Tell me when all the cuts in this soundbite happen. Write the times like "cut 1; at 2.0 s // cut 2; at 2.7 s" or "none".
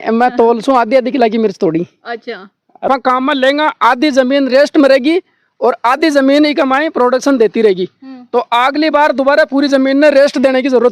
cut 1; at 2.9 s